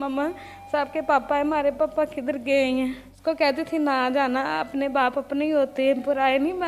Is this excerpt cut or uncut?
cut